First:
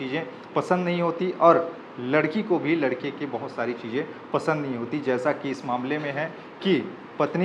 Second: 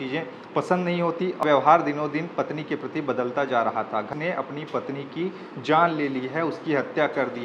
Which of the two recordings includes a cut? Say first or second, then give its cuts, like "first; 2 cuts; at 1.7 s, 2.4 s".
second; 2 cuts; at 1.4 s, 4.1 s